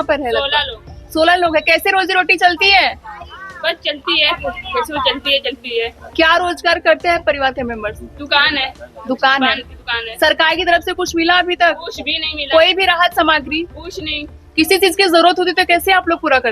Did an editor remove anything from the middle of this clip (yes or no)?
no